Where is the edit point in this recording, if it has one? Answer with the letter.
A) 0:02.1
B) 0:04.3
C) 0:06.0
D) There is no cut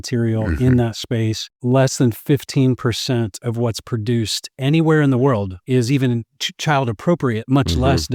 D